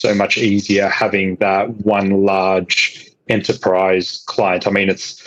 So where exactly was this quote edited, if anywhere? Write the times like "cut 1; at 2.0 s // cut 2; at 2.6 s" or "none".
none